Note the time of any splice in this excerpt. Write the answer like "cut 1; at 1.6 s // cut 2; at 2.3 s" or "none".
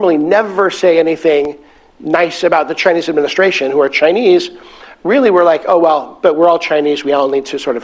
none